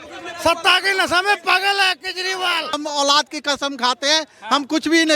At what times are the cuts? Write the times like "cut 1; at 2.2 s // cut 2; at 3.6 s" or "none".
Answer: cut 1; at 2.8 s